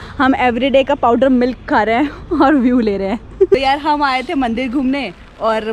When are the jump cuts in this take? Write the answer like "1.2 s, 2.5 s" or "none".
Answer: 3.4 s